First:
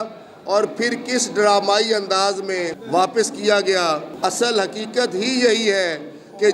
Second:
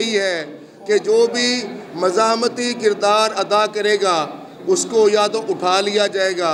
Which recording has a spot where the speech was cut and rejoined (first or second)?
first